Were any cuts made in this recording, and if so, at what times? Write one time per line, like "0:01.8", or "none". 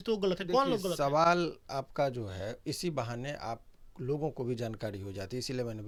none